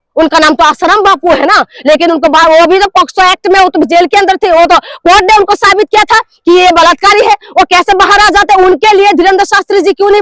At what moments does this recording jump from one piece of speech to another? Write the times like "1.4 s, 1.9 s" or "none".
none